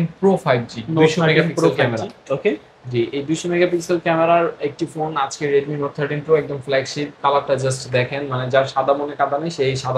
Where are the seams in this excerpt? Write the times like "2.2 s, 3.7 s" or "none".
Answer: none